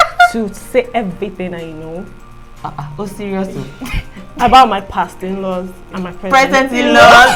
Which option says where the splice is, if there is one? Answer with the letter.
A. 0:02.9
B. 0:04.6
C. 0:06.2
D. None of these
D